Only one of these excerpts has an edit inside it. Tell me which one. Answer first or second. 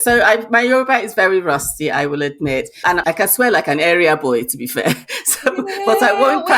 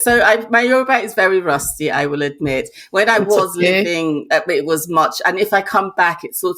first